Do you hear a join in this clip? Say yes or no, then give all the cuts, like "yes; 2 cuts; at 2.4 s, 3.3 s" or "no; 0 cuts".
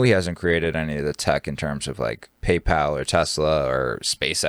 no; 0 cuts